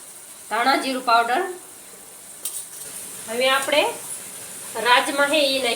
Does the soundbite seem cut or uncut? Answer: cut